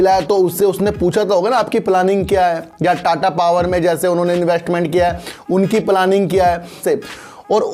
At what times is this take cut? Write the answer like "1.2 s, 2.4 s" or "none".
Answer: 6.8 s